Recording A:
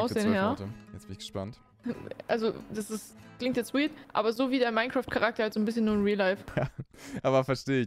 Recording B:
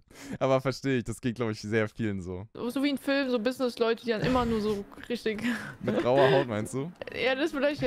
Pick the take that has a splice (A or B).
B